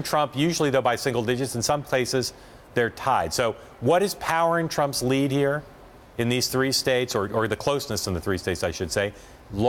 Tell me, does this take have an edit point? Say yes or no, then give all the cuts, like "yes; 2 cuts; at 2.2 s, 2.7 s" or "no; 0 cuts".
yes; 1 cut; at 1.4 s